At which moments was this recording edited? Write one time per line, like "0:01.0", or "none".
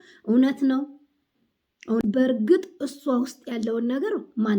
0:02.0

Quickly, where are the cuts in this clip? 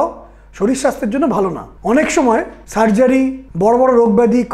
0:01.7
0:02.6
0:03.4

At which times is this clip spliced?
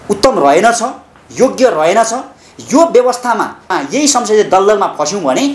0:03.6

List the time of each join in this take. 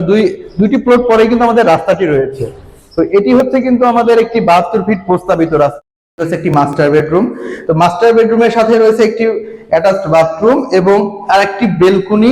0:05.7

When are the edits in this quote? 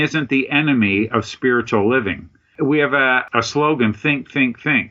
0:02.5
0:03.2

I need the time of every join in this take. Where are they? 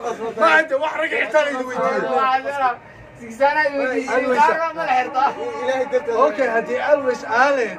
none

